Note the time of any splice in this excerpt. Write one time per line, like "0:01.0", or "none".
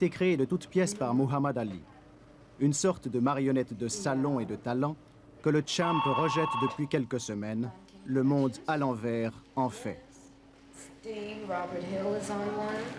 0:11.8